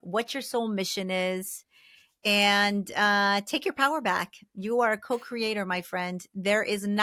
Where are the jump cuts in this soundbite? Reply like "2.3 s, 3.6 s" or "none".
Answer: none